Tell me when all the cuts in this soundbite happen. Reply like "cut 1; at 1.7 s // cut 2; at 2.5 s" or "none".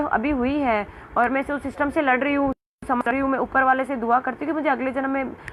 none